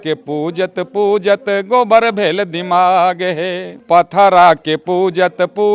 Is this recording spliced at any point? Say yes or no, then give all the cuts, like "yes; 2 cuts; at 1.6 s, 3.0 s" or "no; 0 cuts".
no; 0 cuts